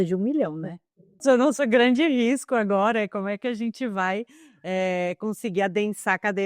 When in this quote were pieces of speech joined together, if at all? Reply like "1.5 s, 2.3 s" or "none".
1.2 s